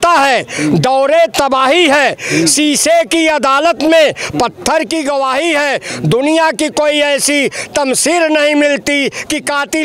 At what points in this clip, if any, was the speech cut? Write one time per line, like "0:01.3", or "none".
none